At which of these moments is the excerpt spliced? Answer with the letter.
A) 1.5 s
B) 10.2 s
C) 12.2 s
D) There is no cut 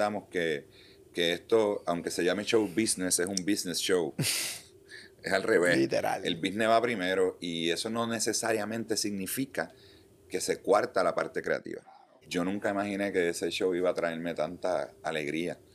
C